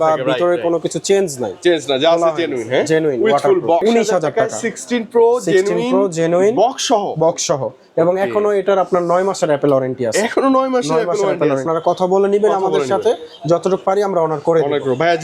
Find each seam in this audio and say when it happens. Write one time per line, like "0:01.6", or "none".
0:03.8
0:11.6